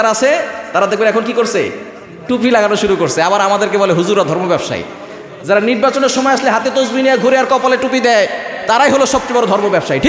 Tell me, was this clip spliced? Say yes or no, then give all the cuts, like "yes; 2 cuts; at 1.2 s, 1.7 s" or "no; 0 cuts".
no; 0 cuts